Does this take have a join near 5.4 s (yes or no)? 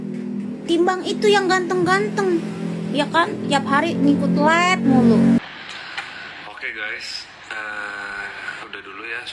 yes